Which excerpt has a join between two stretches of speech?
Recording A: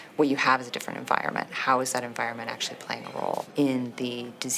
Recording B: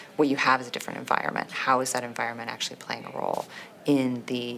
A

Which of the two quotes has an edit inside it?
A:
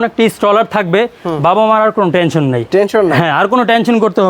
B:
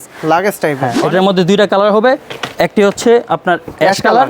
B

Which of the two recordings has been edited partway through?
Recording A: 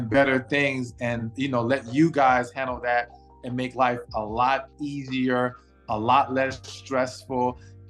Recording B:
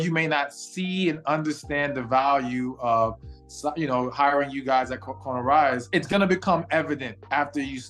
B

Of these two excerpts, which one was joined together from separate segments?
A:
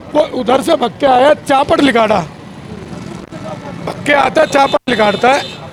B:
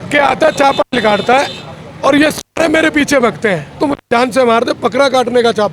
B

